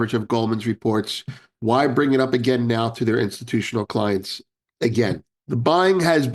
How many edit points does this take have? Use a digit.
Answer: 1